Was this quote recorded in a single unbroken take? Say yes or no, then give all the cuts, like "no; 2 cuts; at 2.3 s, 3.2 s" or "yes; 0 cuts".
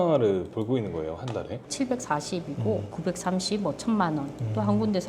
no; 2 cuts; at 1.7 s, 2.9 s